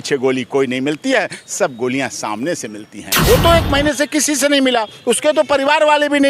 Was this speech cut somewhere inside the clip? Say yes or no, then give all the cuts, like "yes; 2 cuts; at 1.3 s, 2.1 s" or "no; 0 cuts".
yes; 1 cut; at 3.2 s